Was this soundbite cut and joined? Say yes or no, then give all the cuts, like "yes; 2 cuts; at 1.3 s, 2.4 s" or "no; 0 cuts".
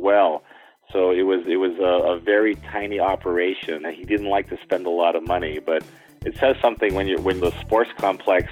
yes; 2 cuts; at 3.9 s, 7.4 s